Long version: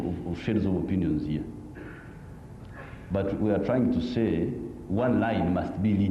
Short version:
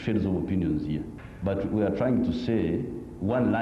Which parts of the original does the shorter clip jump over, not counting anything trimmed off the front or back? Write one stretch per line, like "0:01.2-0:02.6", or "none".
0:01.6-0:02.9